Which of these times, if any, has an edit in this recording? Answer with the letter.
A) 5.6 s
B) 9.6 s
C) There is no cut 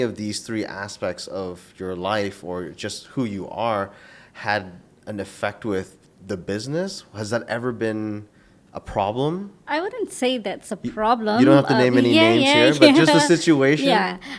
B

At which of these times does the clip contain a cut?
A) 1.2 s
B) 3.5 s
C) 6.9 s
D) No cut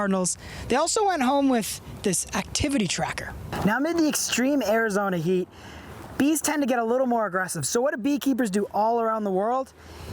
B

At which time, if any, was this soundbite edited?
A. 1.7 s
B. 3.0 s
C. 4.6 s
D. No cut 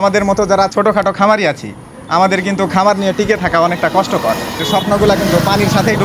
C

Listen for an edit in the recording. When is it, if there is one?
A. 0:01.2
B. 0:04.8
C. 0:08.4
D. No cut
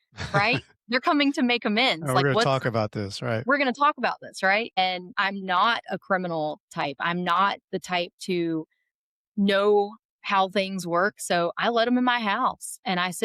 B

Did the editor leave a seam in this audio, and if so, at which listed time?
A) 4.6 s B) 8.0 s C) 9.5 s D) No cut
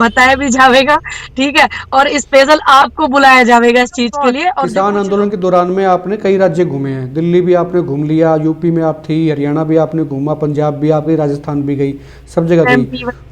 A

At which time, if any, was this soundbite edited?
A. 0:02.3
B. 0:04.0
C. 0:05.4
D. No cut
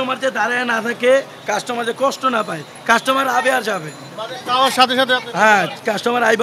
D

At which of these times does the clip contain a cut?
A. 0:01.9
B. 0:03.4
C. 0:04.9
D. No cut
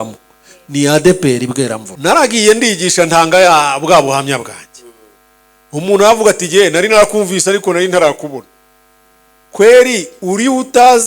A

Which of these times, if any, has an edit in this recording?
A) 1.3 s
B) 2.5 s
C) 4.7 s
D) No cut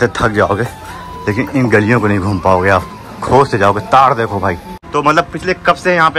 C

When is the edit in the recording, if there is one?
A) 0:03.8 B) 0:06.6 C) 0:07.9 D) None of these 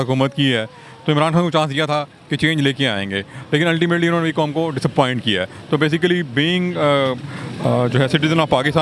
D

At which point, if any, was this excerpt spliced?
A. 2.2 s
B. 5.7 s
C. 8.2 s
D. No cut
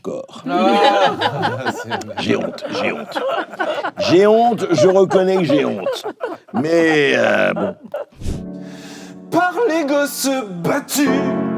C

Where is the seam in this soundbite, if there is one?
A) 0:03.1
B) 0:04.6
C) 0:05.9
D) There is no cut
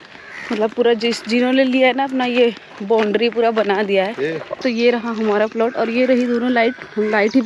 B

